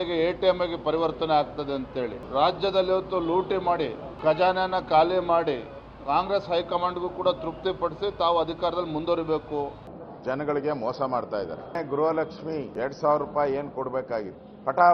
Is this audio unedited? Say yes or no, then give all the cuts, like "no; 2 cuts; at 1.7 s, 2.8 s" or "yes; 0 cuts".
yes; 0 cuts